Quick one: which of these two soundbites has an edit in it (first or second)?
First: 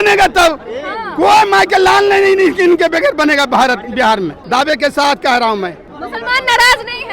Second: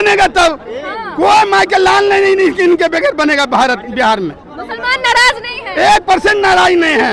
first